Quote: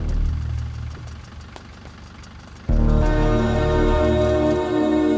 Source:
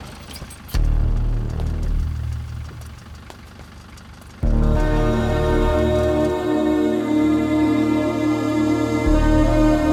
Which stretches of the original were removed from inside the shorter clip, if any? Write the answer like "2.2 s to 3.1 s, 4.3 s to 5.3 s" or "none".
none